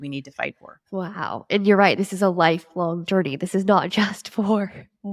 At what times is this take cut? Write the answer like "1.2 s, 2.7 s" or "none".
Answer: none